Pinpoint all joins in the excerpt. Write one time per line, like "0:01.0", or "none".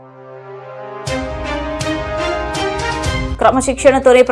0:03.3